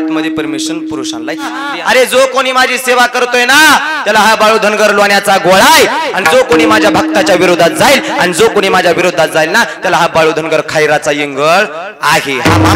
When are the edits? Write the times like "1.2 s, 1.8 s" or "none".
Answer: 1.7 s